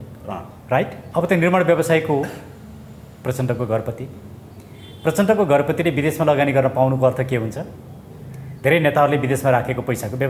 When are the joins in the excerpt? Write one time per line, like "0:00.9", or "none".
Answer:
0:01.0